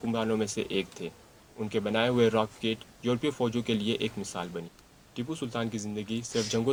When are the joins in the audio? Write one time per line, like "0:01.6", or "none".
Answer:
none